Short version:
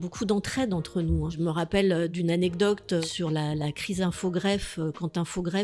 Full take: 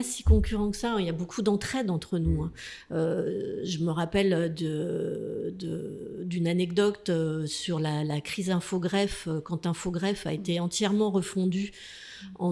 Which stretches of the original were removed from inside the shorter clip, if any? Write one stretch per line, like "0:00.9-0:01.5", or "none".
0:02.5-0:03.7
0:04.5-0:06.3
0:07.2-0:07.5